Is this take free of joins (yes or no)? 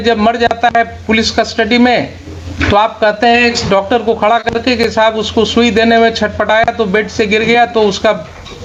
yes